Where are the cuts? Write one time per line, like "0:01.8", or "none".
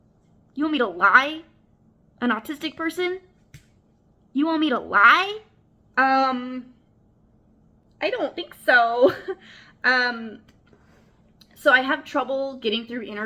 none